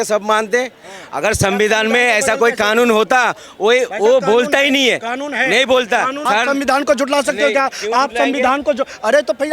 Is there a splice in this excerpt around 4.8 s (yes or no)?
no